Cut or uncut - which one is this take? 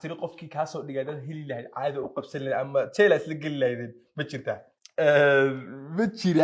cut